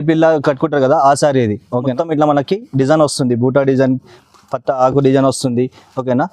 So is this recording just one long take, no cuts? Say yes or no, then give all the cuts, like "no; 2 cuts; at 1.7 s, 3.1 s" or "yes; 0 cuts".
no; 1 cut; at 1.9 s